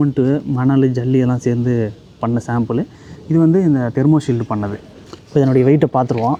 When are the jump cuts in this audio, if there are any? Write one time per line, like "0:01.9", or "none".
none

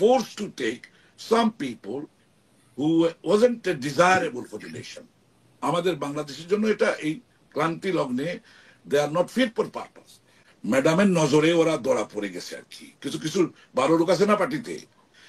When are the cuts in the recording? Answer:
0:10.5

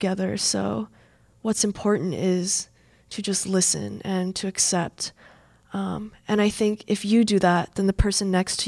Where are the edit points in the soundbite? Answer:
none

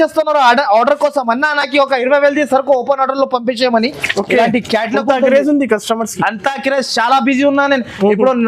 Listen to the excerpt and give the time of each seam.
none

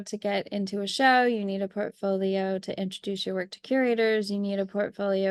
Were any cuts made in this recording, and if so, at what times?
none

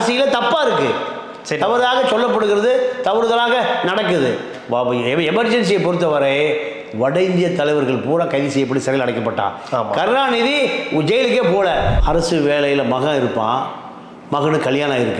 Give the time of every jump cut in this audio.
0:12.0

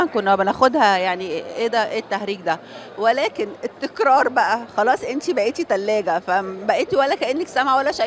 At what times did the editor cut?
none

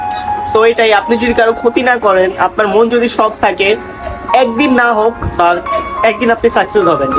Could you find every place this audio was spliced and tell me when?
none

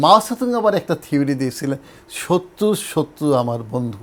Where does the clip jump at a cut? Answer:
none

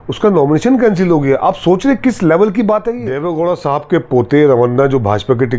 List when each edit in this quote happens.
0:03.1

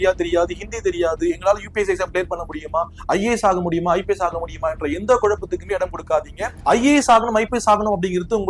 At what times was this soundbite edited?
none

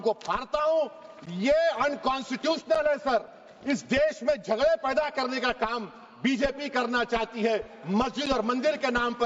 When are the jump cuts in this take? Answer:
none

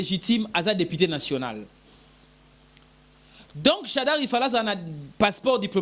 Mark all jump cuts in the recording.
none

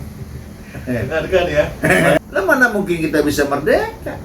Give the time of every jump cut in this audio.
0:01.8

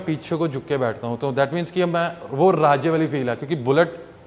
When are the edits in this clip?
none

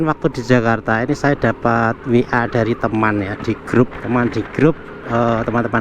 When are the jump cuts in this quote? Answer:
0:04.0

